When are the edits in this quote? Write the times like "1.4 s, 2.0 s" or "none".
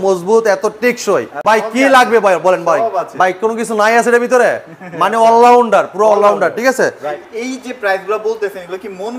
1.3 s, 7.1 s